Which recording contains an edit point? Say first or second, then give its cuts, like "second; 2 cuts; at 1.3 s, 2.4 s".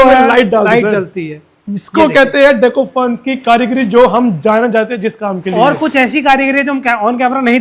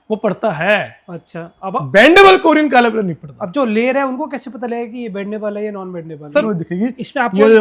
second; 1 cut; at 6.4 s